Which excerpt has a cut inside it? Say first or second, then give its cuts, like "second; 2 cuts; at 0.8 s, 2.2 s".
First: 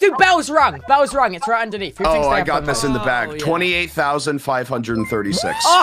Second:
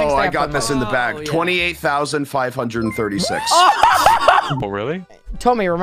second; 1 cut; at 4.6 s